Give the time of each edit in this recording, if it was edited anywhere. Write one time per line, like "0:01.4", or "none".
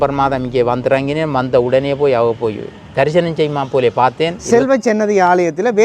0:04.4